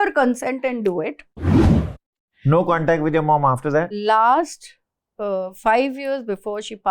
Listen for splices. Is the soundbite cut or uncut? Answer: cut